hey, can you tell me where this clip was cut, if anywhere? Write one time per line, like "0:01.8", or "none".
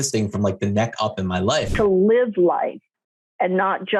0:01.7

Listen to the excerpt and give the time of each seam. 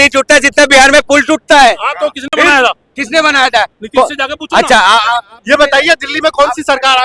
none

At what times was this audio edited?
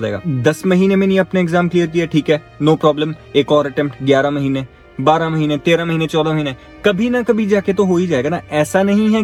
none

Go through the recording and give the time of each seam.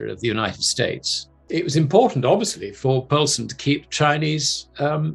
0:01.3

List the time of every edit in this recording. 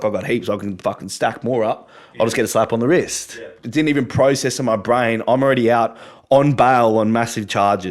0:03.5

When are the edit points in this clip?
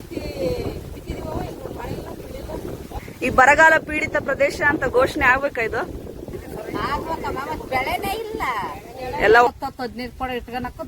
0:03.0
0:06.4
0:09.5

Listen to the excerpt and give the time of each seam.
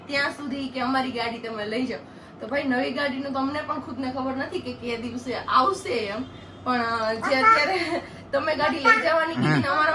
none

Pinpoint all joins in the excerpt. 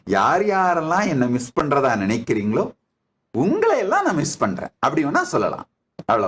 none

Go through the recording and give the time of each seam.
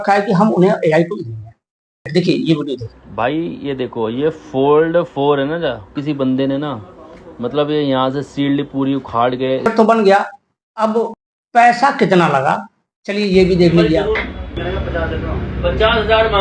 0:02.1
0:09.7
0:14.6

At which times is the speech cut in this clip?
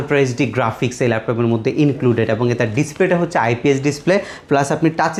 none

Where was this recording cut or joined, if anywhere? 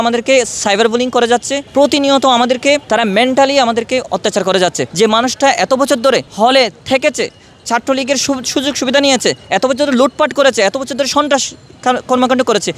0:01.6
0:02.8
0:04.8
0:06.3

